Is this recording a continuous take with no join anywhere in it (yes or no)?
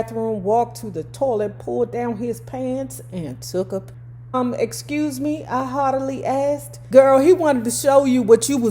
no